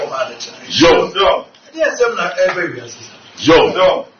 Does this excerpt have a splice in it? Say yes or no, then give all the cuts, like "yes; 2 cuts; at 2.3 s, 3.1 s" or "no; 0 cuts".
no; 0 cuts